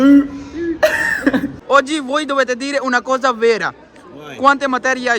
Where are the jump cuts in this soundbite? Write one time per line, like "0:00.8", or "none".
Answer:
0:01.5